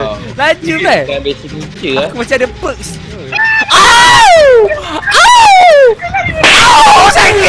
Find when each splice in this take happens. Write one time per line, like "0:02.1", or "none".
none